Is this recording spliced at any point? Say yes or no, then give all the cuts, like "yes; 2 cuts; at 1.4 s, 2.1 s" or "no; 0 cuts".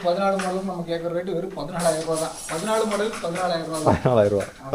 no; 0 cuts